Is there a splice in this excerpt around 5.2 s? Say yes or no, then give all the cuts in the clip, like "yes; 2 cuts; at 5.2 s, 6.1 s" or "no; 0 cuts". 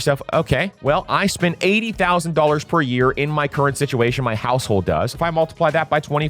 yes; 1 cut; at 5.2 s